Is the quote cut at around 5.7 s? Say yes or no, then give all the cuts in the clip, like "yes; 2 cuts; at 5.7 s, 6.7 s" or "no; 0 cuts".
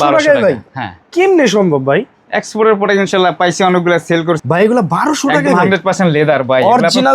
no; 1 cut; at 4.4 s